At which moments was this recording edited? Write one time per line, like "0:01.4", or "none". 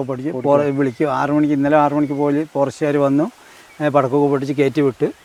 none